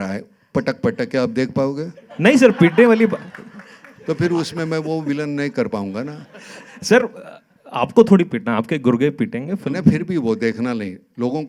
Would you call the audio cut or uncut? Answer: uncut